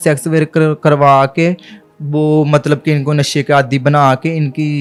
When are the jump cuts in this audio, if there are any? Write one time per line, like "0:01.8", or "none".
none